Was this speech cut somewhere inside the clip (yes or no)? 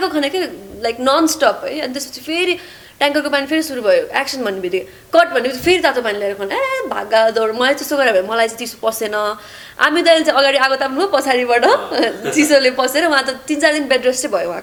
no